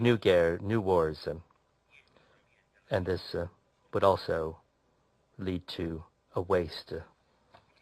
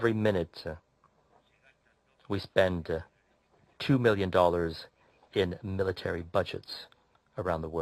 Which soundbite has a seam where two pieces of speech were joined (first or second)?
first